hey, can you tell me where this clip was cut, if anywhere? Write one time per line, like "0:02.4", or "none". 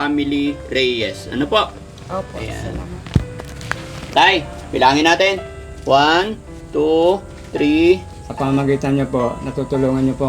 0:08.2